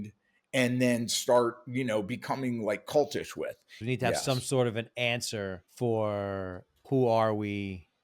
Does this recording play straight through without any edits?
no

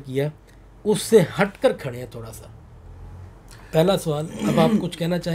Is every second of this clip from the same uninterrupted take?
yes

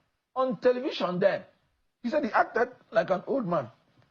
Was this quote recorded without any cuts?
yes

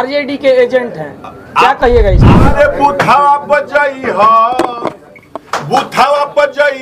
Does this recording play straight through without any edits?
no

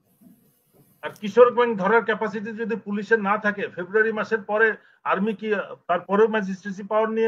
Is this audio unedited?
yes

